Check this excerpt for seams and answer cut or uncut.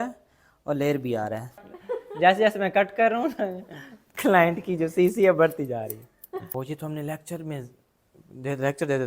cut